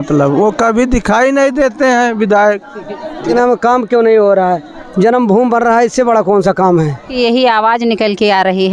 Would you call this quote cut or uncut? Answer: cut